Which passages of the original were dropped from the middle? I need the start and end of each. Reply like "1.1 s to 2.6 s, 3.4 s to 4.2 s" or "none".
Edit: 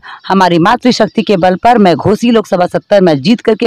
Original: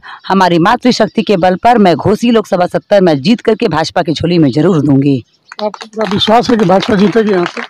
none